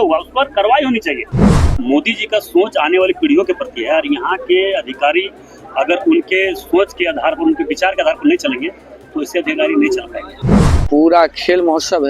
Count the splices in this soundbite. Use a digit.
2